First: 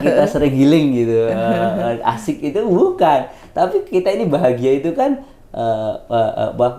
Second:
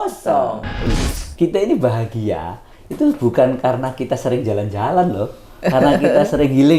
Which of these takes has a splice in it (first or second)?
second